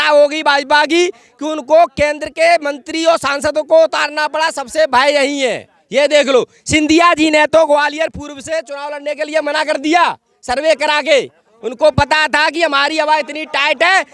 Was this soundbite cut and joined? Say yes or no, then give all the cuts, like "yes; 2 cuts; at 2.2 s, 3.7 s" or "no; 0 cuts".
no; 0 cuts